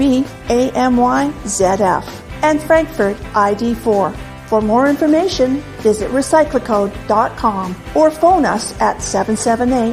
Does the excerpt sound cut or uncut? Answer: uncut